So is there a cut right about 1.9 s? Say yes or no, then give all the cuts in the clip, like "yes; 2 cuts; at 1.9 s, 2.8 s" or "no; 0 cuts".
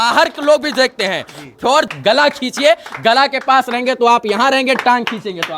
yes; 1 cut; at 1.9 s